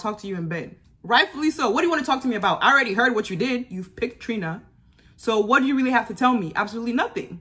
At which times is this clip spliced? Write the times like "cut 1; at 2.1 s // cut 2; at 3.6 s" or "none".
none